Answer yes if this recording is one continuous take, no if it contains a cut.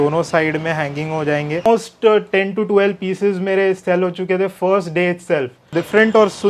no